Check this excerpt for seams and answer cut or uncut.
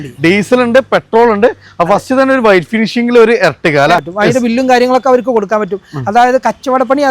cut